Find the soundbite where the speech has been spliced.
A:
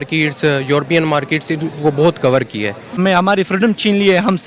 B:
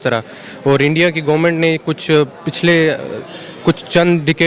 A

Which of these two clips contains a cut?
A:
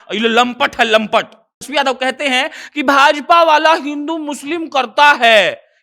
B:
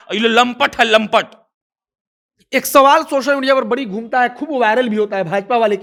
A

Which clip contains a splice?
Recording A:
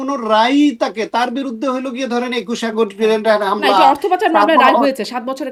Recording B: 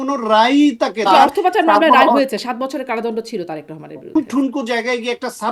B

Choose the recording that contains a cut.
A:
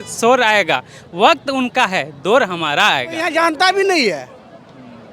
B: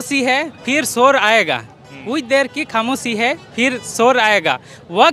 A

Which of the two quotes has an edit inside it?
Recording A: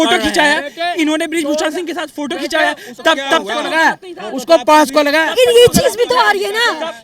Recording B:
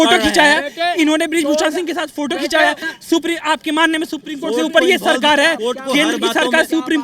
B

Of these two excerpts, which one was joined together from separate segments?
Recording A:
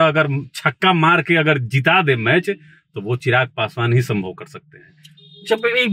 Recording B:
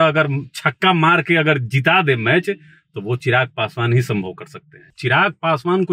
B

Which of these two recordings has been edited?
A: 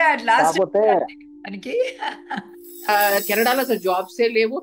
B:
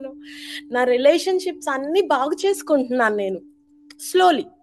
A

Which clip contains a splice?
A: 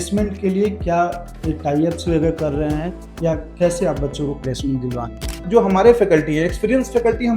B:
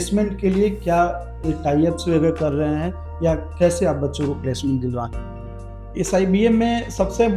A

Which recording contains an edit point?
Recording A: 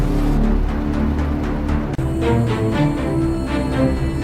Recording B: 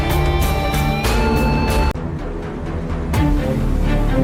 A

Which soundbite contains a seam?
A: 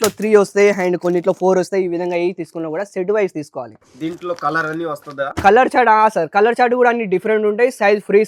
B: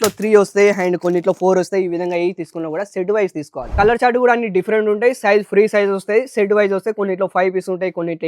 B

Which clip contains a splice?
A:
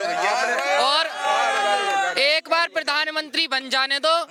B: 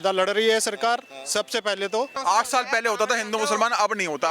B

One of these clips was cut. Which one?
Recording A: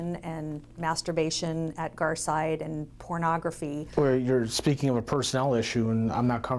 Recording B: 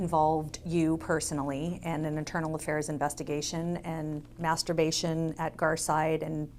A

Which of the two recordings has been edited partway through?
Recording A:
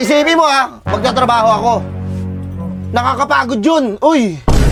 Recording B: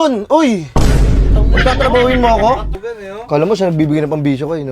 B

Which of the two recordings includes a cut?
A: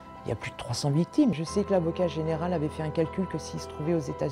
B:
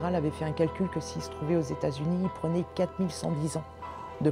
A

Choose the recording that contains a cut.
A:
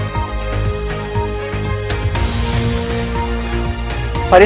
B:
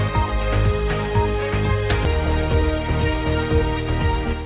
A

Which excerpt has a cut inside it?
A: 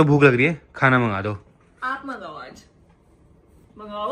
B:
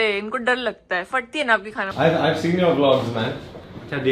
B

